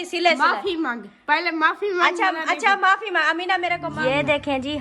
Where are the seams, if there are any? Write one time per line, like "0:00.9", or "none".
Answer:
0:03.9